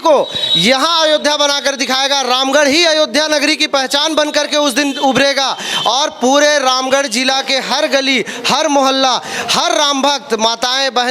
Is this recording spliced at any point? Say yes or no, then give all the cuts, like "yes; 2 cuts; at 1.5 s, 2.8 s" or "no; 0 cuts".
no; 0 cuts